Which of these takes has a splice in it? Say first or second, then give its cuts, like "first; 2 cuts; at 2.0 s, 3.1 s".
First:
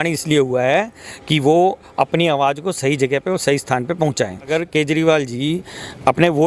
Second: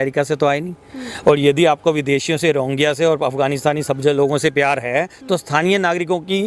first; 1 cut; at 4.5 s